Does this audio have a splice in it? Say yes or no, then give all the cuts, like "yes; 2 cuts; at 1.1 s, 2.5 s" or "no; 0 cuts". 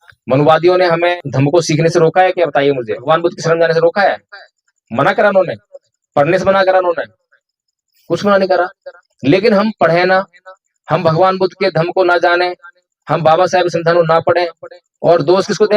yes; 2 cuts; at 1.1 s, 3.0 s